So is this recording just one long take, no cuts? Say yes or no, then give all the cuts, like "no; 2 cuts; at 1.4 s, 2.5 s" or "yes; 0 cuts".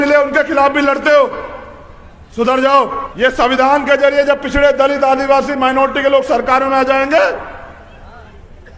no; 1 cut; at 3.0 s